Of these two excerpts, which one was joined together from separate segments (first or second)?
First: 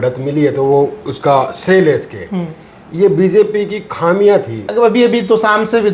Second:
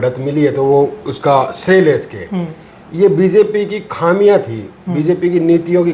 first